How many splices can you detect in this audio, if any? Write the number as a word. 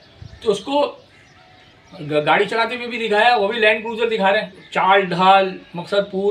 one